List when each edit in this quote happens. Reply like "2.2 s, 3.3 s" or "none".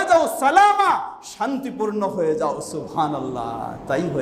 none